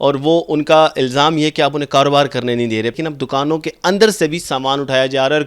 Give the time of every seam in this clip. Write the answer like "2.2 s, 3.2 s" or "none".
2.9 s